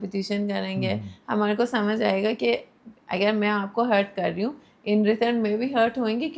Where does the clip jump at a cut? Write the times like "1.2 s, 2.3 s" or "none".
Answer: none

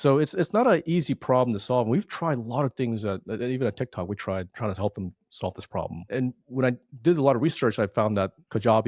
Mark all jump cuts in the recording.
6.0 s

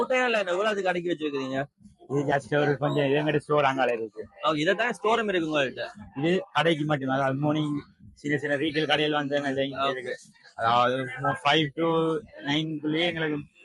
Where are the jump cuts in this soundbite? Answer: none

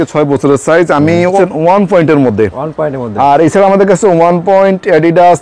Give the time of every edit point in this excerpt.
1.4 s

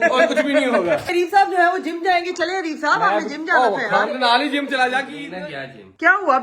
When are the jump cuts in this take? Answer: 1.1 s, 5.2 s

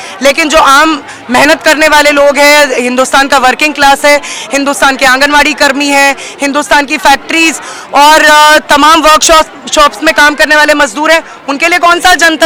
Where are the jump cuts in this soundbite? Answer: none

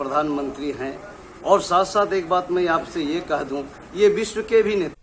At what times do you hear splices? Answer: none

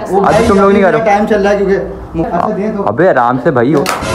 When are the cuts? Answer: 2.2 s

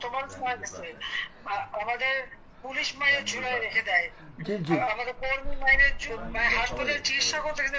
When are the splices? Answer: none

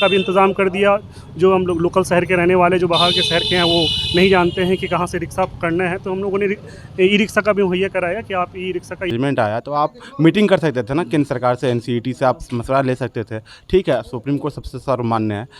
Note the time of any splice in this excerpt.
9.1 s

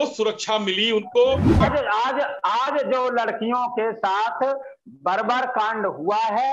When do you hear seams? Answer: 1.6 s

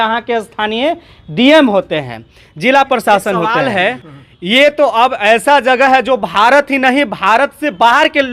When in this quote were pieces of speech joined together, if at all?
3.6 s

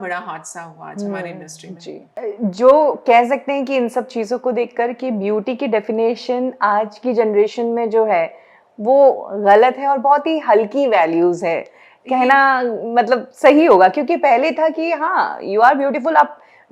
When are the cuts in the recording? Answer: none

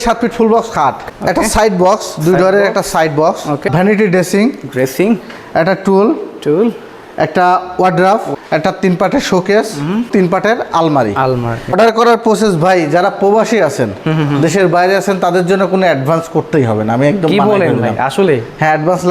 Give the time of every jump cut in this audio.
1.1 s, 3.6 s, 8.3 s, 10.1 s, 11.7 s

